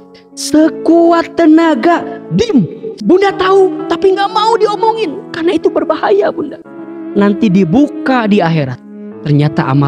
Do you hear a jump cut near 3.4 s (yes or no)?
no